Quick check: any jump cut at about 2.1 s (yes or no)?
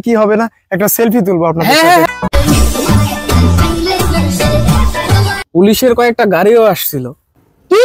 yes